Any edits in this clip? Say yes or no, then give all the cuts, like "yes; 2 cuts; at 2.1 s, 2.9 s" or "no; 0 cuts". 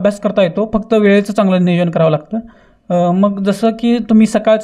no; 0 cuts